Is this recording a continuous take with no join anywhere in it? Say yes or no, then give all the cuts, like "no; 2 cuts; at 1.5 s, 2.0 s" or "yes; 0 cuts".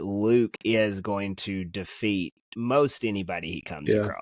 yes; 0 cuts